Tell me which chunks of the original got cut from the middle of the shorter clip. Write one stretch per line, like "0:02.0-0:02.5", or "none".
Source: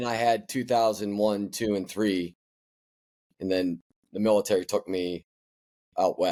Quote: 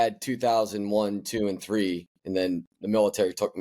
0:02.9-0:04.0